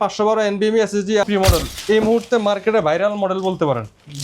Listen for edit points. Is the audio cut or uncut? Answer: cut